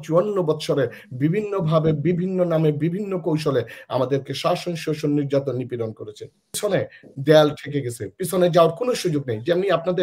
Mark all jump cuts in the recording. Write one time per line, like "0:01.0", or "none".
0:06.5